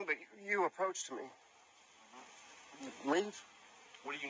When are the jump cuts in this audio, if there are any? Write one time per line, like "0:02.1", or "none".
none